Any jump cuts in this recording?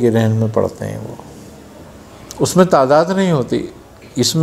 yes; 1 cut; at 1.9 s

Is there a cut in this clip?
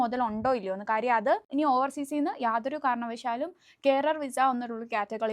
yes; 1 cut; at 1.5 s

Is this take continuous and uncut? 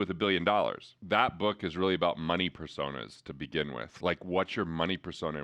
no; 1 cut; at 0.9 s

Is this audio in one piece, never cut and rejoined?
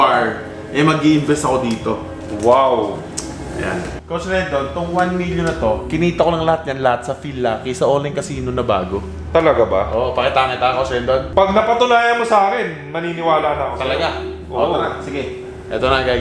no; 1 cut; at 4.1 s

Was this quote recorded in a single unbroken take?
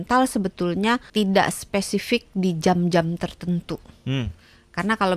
no; 1 cut; at 1.1 s

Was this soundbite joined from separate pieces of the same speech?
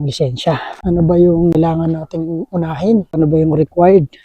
yes; 1 cut; at 3.1 s

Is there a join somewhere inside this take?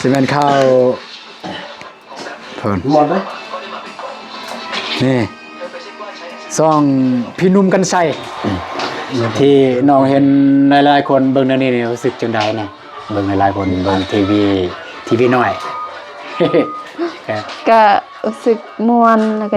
yes; 1 cut; at 8.3 s

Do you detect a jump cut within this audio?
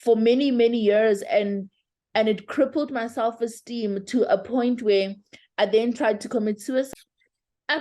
yes; 1 cut; at 6.9 s

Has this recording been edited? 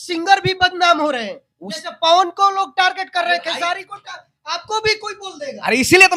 no; 0 cuts

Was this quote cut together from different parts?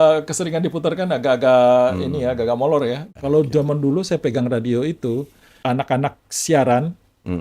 yes; 2 cuts; at 3.1 s, 5.4 s

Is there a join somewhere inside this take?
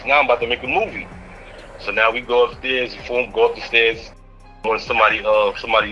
yes; 1 cut; at 4.2 s

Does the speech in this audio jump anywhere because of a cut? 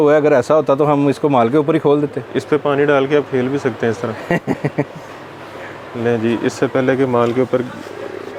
no; 0 cuts

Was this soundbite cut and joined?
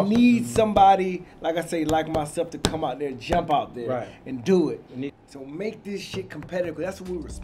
yes; 1 cut; at 5.1 s

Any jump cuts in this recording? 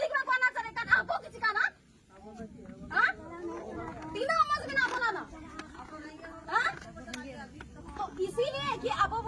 no; 0 cuts

